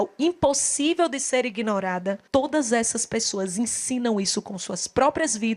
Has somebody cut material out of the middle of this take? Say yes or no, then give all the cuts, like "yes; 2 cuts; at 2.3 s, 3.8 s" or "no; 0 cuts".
yes; 1 cut; at 2.2 s